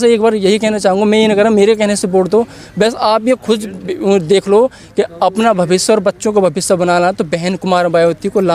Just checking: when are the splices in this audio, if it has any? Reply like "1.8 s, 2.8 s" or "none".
none

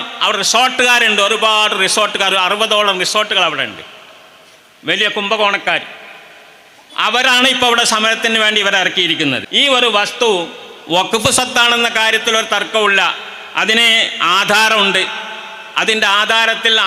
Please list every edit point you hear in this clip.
9.5 s

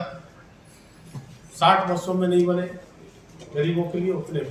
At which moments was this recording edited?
none

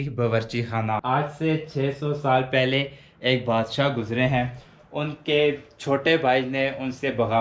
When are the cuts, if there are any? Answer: 1.0 s

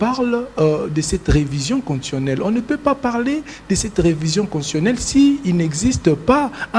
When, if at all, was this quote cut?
none

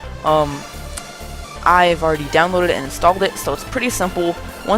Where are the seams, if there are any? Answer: 1.5 s

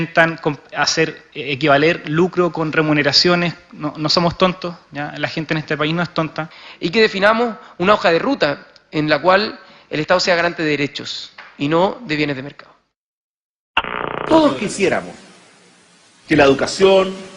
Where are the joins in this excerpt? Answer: 6.6 s

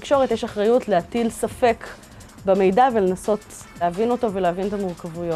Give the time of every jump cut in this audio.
3.8 s

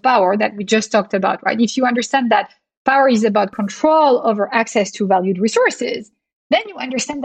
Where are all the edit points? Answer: none

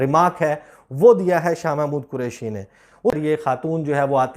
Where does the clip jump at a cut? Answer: 3.1 s

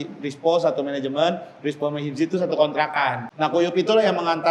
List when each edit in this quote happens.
3.2 s

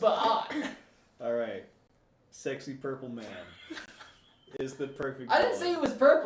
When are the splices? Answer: none

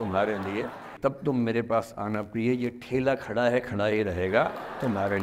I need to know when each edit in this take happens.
0.9 s

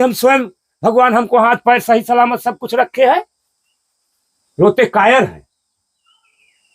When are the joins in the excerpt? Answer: none

